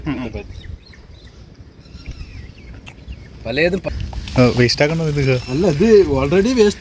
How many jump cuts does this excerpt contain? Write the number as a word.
one